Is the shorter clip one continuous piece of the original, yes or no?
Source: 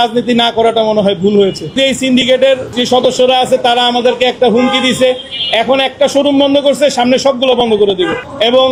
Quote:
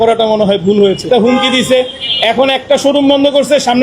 no